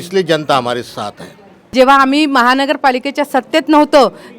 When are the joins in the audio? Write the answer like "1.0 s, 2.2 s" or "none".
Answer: 1.6 s